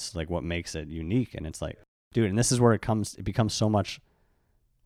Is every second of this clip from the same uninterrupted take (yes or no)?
yes